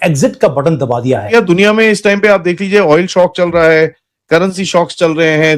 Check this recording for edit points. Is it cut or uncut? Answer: cut